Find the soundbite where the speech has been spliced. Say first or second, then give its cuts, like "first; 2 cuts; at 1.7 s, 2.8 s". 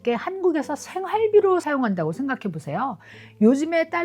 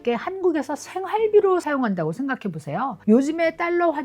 second; 1 cut; at 3.0 s